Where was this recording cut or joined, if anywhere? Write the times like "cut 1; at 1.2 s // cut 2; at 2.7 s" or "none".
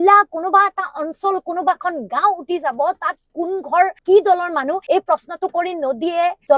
none